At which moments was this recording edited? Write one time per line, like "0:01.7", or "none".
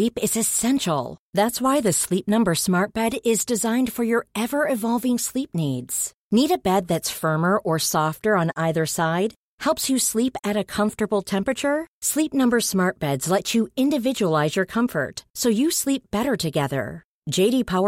none